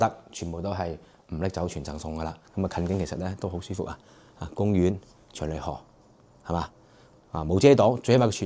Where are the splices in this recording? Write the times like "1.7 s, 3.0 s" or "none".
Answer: 2.4 s

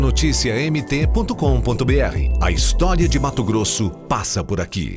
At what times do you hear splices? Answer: none

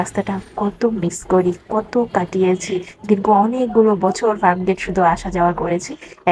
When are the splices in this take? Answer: none

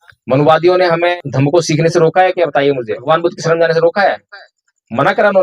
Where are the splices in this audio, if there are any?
1.1 s, 3.0 s

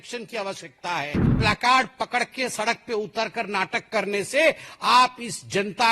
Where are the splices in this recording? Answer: 1.3 s

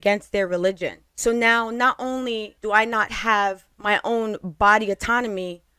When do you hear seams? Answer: 2.5 s, 3.7 s

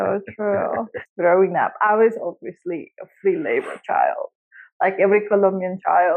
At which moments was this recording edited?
1.0 s

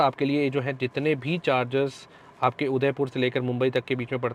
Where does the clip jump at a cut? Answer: none

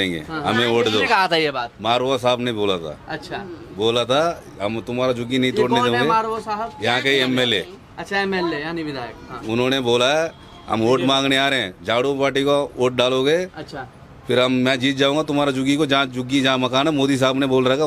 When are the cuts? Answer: none

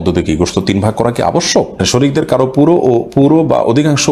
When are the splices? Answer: 1.8 s

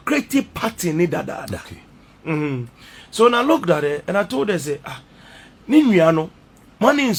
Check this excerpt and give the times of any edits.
none

